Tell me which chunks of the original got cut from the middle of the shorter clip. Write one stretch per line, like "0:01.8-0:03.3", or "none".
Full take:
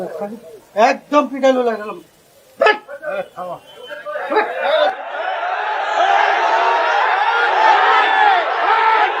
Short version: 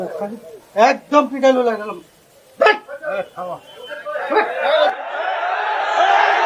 none